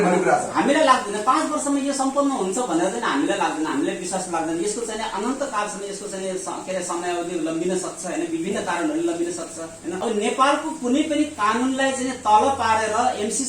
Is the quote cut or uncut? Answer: cut